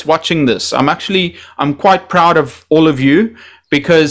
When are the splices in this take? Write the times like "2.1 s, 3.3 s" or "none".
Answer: none